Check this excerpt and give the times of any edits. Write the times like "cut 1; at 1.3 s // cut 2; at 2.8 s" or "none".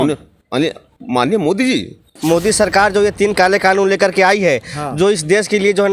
cut 1; at 2.1 s

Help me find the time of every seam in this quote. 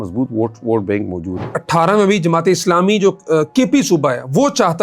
cut 1; at 1.6 s

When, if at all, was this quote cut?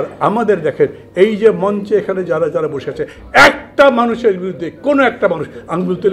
none

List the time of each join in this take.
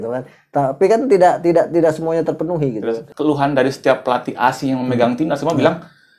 cut 1; at 3.1 s

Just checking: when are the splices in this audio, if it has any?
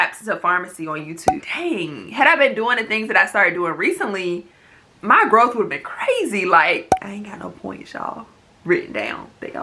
cut 1; at 1.4 s // cut 2; at 7.0 s

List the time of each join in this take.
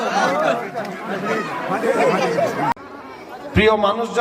cut 1; at 2.7 s

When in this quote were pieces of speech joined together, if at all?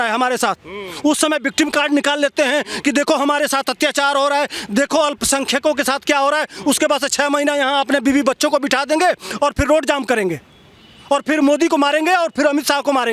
none

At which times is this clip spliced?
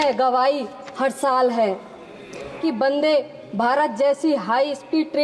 cut 1; at 2.6 s

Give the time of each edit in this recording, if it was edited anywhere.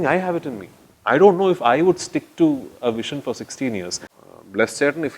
cut 1; at 4.1 s

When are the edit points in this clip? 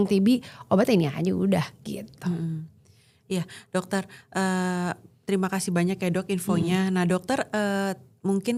none

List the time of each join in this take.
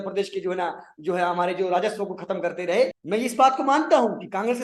cut 1; at 3.0 s

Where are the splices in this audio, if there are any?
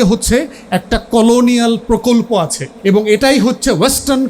cut 1; at 2.6 s

